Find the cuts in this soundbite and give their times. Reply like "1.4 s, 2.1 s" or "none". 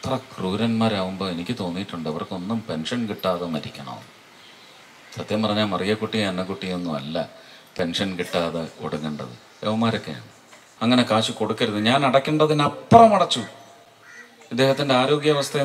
10.6 s